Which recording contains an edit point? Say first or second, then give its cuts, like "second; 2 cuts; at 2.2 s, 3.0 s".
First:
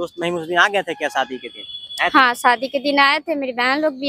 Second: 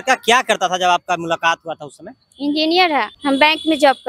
second; 1 cut; at 3.1 s